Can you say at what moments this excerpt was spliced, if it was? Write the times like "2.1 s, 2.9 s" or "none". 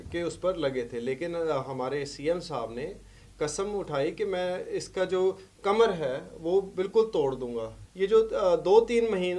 7.8 s